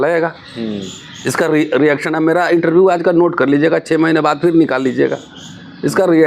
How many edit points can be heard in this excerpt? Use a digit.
0